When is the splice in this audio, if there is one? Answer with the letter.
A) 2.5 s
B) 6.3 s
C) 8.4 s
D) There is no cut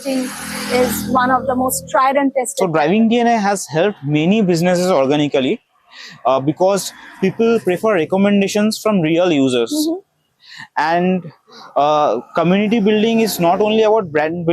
A